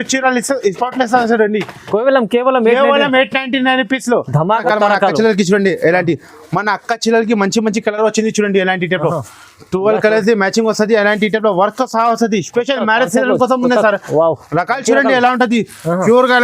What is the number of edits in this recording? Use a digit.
1